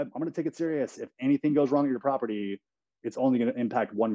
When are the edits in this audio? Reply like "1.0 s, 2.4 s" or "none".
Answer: none